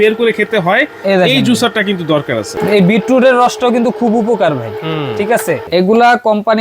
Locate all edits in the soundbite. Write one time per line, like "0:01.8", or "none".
0:02.6
0:05.6